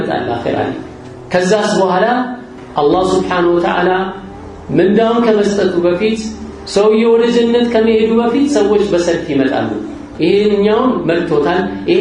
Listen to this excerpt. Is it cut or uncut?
cut